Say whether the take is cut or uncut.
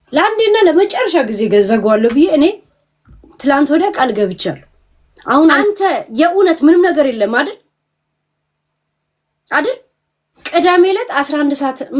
cut